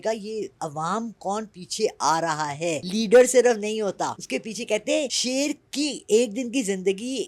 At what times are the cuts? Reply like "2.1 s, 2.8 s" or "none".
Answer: 2.8 s, 4.2 s, 5.2 s